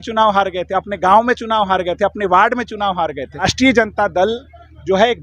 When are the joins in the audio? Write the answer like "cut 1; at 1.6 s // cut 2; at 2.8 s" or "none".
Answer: cut 1; at 3.4 s

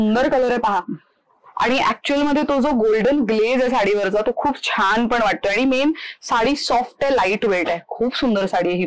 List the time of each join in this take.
none

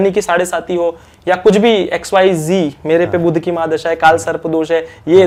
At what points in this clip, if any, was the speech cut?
none

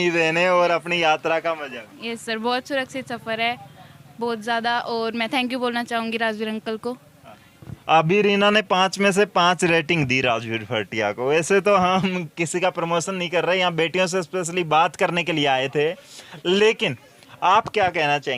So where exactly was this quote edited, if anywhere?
none

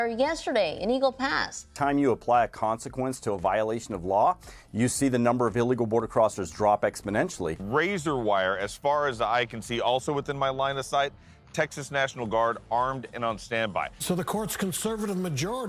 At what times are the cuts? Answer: cut 1; at 1.6 s // cut 2; at 7.7 s // cut 3; at 14.0 s

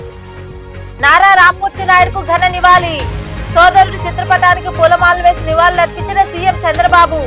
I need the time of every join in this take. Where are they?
none

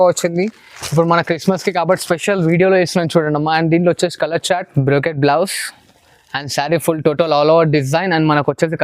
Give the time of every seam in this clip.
cut 1; at 4.6 s

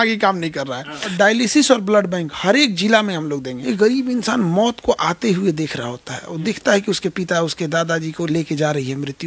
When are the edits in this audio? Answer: cut 1; at 1.1 s // cut 2; at 3.5 s

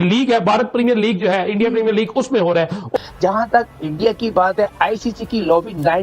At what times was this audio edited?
cut 1; at 3.0 s

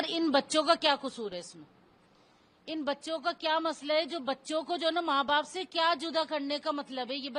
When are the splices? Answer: none

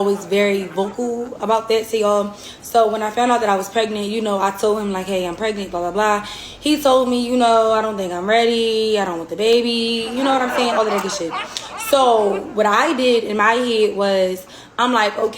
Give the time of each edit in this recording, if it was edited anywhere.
cut 1; at 2.2 s // cut 2; at 6.4 s // cut 3; at 10.0 s

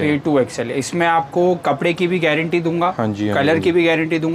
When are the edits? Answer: none

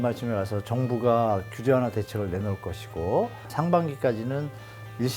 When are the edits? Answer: cut 1; at 3.4 s

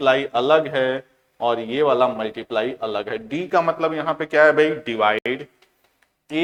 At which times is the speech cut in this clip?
none

